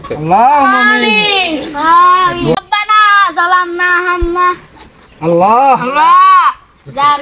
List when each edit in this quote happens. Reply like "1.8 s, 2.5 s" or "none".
2.5 s